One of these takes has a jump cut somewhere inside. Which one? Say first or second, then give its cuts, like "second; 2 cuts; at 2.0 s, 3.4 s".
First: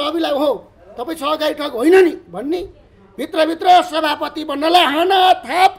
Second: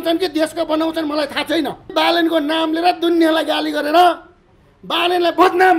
second; 1 cut; at 1.9 s